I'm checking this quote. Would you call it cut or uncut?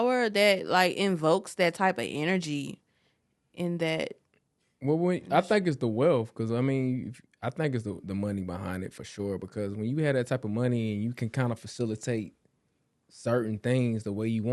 uncut